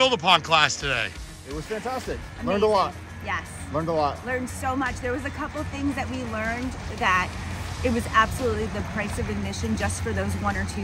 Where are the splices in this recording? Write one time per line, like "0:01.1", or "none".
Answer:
none